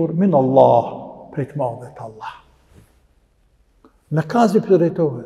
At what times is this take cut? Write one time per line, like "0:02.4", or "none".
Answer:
none